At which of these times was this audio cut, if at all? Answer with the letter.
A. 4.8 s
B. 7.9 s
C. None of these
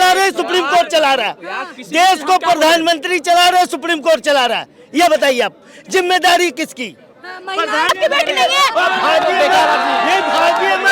B